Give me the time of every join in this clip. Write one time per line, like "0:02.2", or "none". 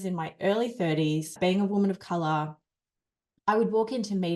none